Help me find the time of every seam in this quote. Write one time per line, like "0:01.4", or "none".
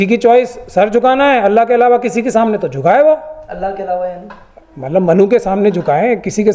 none